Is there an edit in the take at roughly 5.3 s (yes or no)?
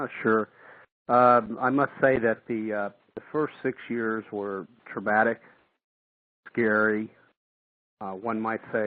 yes